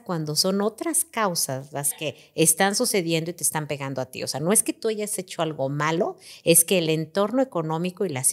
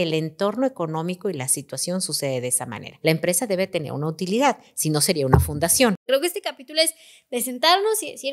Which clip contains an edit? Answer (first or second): second